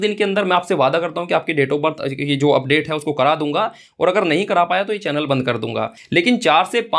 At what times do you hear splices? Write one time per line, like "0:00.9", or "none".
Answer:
0:06.0

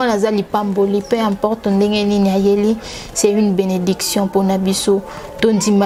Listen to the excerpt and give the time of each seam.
none

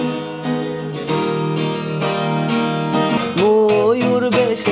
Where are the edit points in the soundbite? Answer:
0:03.2

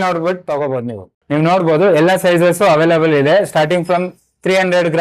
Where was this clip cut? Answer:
0:01.1

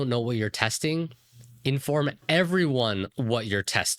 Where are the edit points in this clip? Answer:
0:02.2

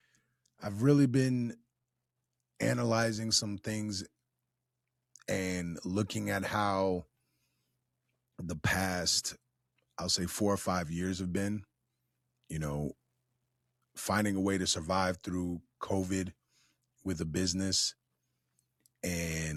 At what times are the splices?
none

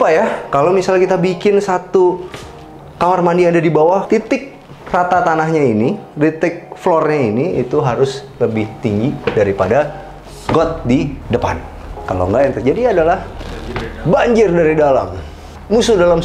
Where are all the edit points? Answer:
0:04.0
0:11.2

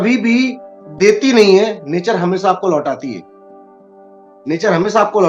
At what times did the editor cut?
none

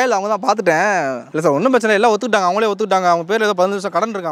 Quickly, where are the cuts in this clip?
0:01.2

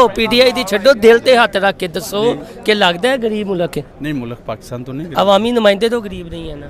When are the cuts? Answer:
none

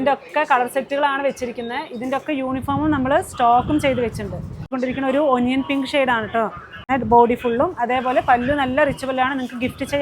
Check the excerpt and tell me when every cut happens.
0:04.7
0:06.9

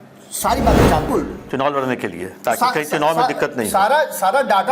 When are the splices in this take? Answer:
0:01.1

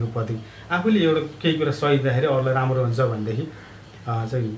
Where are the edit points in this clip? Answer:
none

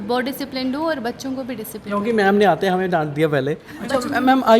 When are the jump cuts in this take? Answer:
0:03.6

